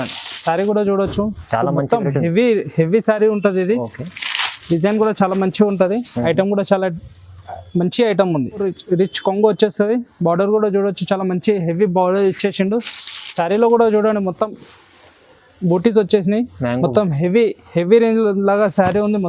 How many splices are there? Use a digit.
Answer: 1